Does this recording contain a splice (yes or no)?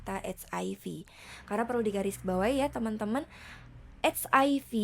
yes